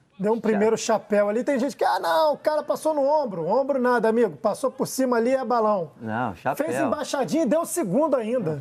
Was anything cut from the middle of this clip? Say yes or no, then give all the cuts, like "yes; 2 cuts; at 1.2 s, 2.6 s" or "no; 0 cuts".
no; 0 cuts